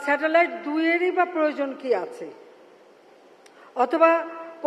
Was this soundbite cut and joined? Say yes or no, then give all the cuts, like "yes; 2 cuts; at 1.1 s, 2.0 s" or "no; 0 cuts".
no; 0 cuts